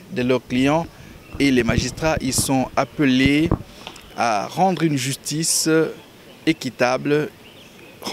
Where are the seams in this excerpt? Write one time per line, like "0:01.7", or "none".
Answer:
none